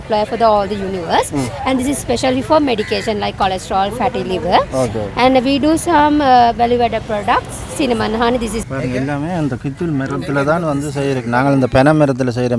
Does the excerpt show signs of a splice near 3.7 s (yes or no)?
no